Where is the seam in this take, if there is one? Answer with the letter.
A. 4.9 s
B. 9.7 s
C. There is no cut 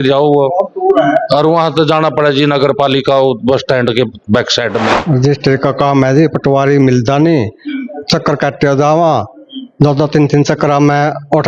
A